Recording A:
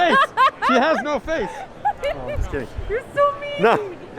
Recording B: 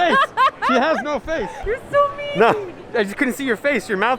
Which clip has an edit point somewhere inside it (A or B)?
B